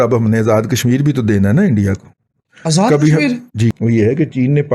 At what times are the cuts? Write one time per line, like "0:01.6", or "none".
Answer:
0:03.7